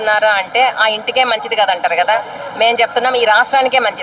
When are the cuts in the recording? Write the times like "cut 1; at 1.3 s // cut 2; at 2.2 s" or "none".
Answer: none